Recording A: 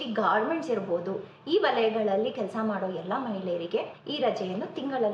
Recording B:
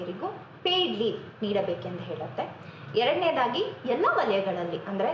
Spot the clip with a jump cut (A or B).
A